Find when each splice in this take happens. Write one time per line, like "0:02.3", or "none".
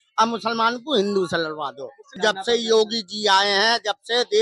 0:02.2